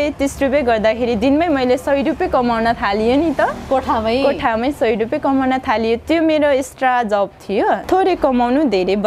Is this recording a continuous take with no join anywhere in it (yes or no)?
no